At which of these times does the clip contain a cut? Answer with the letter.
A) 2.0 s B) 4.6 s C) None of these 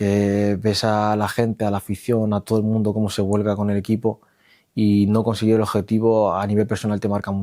C